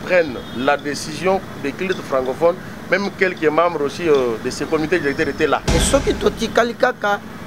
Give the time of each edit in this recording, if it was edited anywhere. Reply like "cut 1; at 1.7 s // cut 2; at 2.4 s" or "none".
cut 1; at 5.7 s